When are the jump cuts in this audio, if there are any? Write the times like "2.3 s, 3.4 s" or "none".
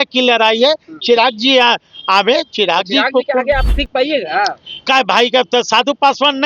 3.7 s